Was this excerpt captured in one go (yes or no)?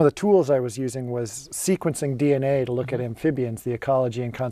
no